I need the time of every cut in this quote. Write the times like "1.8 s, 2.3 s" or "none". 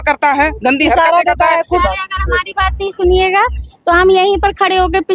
1.8 s